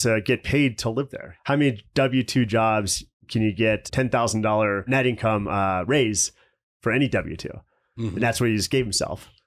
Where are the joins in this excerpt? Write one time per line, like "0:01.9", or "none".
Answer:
0:01.3
0:03.9
0:04.9